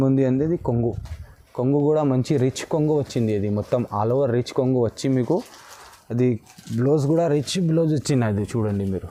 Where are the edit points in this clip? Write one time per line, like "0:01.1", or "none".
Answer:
none